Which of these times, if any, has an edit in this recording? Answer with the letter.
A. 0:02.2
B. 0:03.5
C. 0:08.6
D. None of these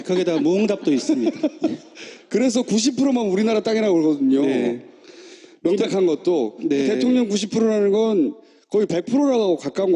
D